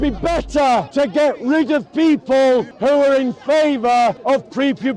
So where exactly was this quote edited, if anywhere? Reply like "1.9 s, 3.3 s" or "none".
0.9 s, 2.7 s, 4.2 s